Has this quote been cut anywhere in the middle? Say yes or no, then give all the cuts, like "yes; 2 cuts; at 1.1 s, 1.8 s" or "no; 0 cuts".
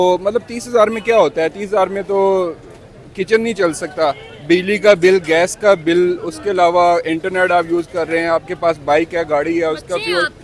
no; 0 cuts